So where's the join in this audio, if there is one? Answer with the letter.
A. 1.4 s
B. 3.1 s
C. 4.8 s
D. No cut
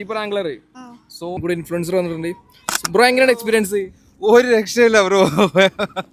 A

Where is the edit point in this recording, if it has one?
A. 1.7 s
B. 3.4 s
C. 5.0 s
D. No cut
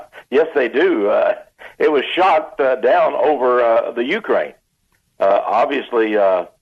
C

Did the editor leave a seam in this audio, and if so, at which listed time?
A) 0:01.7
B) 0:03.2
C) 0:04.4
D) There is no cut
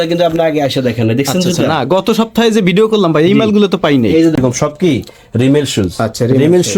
C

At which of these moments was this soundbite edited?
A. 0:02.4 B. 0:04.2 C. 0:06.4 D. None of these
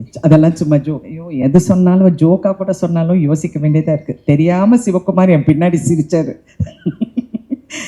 D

